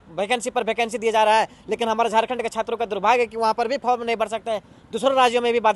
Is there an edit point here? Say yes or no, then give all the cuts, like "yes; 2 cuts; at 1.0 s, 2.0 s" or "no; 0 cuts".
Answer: no; 0 cuts